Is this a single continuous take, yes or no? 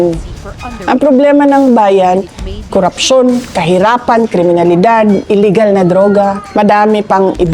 no